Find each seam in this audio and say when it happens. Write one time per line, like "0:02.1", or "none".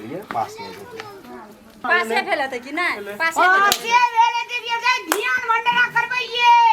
0:01.8